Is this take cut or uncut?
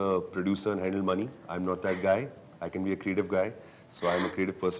uncut